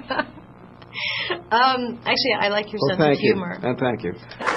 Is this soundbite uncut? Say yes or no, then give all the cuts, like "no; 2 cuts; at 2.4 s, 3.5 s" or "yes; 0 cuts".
no; 1 cut; at 1.9 s